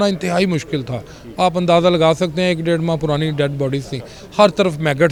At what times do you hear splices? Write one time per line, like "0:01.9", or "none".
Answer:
none